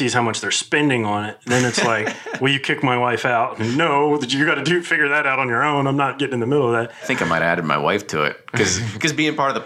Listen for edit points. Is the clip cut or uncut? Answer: cut